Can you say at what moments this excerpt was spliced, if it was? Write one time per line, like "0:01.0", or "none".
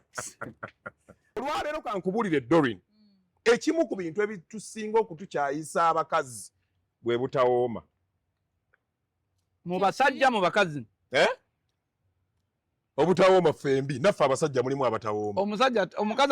0:01.4